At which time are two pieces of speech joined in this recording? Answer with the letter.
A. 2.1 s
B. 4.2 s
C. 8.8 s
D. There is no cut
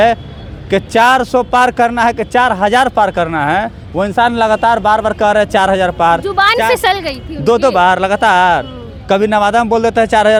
D